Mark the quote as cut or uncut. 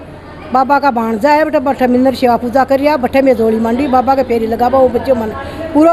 uncut